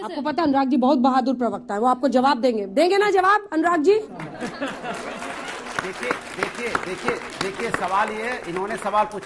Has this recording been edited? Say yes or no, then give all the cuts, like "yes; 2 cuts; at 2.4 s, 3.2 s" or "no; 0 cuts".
no; 0 cuts